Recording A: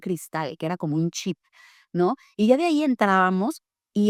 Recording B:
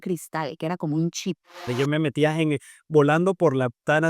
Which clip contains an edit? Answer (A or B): B